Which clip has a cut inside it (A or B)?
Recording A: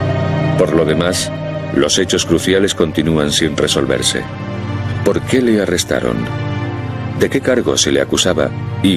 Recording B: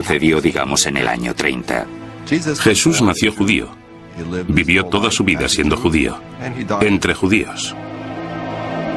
B